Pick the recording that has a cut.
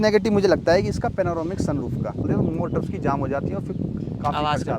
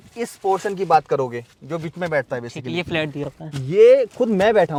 first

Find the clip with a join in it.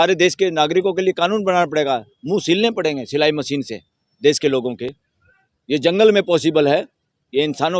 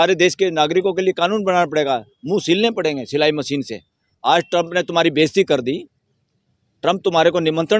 second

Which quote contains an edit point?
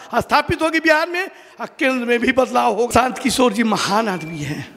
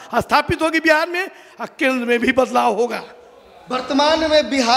first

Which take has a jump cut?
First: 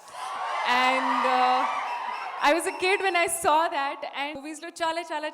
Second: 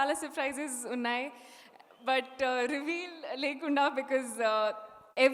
first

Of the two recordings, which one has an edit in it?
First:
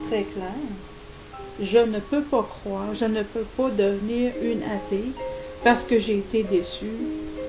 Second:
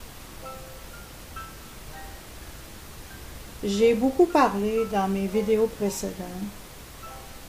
first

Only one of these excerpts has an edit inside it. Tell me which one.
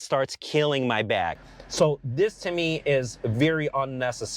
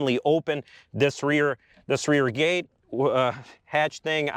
first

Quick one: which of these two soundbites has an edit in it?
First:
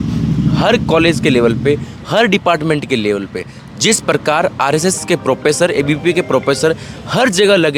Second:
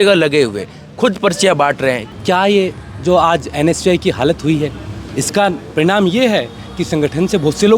second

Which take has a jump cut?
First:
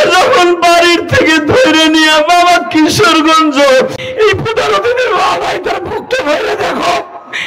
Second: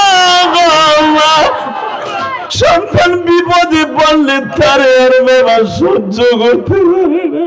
first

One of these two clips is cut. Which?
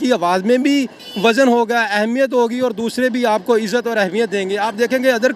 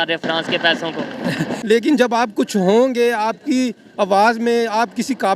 second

